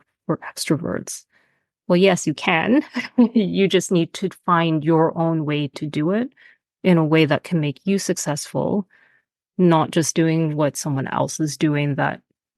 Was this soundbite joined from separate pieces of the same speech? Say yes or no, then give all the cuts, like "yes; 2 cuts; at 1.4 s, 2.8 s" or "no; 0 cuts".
no; 0 cuts